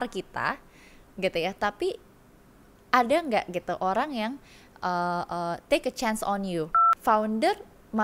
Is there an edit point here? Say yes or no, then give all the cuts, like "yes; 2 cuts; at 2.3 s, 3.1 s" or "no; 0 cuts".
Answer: yes; 1 cut; at 6.8 s